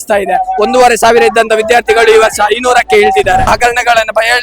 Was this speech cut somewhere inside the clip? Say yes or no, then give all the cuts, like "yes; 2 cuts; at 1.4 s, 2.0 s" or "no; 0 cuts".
yes; 1 cut; at 3.5 s